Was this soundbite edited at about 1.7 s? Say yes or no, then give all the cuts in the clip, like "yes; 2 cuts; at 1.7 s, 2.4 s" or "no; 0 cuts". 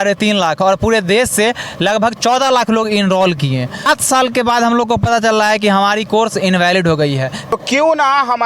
no; 2 cuts; at 3.9 s, 7.5 s